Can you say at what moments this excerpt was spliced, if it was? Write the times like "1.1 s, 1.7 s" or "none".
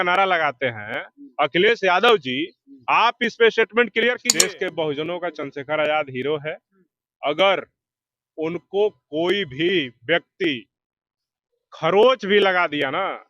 4.3 s